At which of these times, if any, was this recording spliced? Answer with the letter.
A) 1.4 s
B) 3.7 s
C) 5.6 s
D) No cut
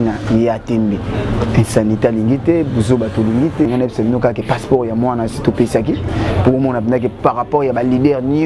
B